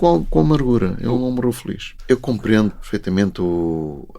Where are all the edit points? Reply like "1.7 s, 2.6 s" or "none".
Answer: 1.9 s, 2.9 s